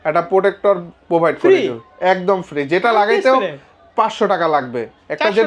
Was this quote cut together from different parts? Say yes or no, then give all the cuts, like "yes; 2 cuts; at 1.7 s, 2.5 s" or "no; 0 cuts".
no; 0 cuts